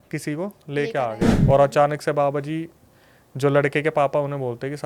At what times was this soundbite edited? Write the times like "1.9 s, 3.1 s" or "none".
1.3 s